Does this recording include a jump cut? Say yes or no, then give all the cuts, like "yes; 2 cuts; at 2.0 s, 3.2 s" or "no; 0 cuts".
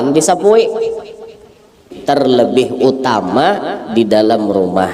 yes; 1 cut; at 1.9 s